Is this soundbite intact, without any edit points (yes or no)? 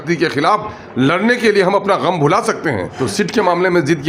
no